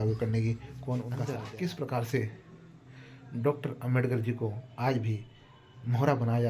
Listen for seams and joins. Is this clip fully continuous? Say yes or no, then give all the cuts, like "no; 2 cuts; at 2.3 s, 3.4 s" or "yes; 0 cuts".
no; 1 cut; at 1.2 s